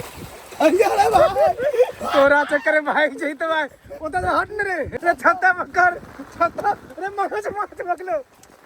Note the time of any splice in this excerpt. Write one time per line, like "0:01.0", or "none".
0:04.9